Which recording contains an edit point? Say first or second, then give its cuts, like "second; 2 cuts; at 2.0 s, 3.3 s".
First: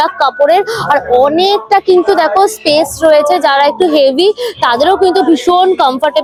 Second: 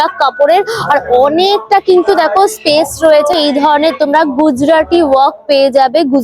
second; 1 cut; at 3.3 s